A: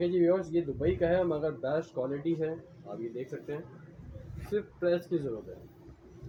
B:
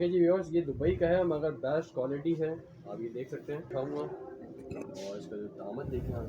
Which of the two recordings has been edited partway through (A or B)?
B